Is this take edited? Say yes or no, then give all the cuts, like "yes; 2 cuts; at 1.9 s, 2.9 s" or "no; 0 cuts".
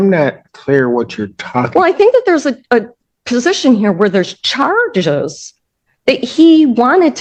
no; 0 cuts